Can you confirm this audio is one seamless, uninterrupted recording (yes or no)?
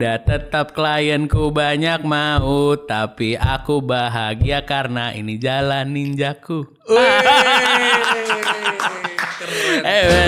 yes